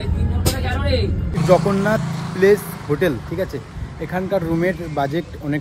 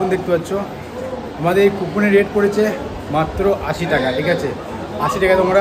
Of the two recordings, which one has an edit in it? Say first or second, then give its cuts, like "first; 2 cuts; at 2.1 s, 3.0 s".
first; 1 cut; at 1.4 s